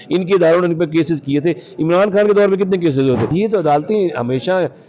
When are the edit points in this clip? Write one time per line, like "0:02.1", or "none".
0:03.3